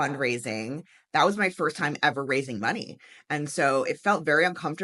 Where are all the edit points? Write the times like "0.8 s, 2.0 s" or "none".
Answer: none